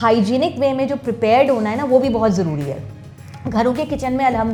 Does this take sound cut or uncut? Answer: uncut